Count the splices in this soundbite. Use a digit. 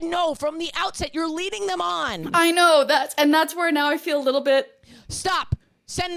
0